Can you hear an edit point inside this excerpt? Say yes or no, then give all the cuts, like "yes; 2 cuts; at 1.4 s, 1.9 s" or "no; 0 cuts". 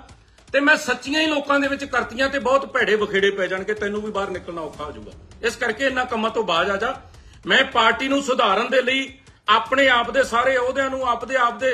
no; 0 cuts